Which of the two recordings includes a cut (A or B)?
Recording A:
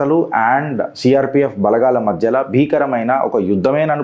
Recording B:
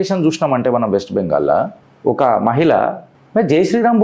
B